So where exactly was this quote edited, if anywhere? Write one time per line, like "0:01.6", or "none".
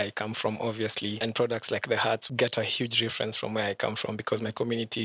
0:01.2
0:02.3